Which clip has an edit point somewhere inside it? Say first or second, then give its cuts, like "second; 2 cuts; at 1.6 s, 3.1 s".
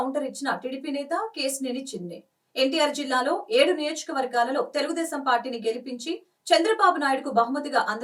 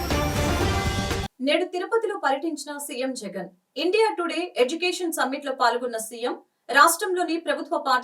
second; 1 cut; at 1.0 s